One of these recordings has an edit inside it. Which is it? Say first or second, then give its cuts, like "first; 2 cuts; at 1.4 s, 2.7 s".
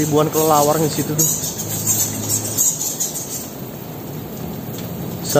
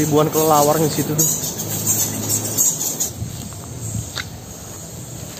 second; 1 cut; at 3.1 s